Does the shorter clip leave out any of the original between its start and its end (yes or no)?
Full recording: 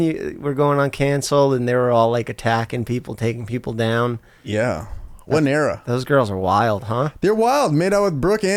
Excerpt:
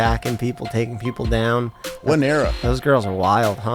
yes